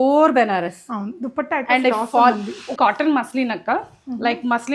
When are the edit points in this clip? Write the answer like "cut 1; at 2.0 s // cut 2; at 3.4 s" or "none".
cut 1; at 2.7 s